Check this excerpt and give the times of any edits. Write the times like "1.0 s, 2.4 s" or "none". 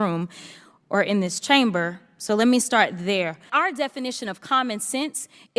3.5 s